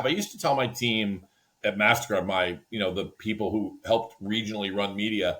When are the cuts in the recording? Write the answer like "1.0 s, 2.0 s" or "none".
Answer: 1.4 s